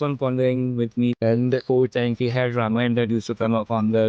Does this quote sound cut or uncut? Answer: cut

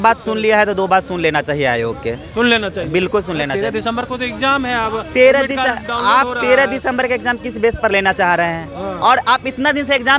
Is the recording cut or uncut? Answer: uncut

